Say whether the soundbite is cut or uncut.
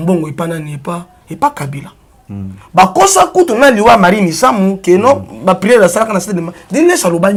uncut